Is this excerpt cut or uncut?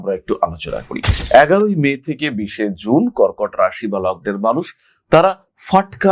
cut